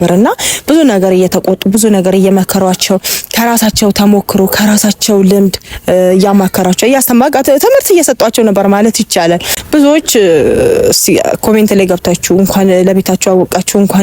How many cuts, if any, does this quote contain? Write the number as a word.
one